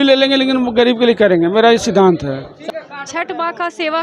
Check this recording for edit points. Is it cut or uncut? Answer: cut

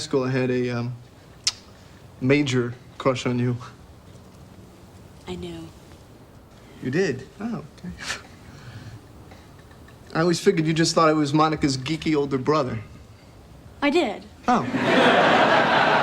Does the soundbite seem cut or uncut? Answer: cut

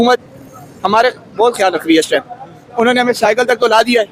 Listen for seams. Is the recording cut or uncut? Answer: uncut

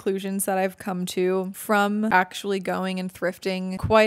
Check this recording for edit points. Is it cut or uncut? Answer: cut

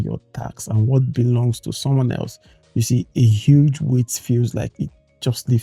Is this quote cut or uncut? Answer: uncut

